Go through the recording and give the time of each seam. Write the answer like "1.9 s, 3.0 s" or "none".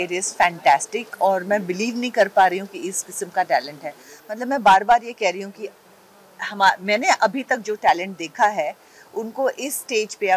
none